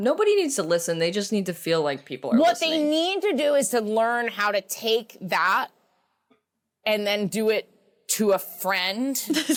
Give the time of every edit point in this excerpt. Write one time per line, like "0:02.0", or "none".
none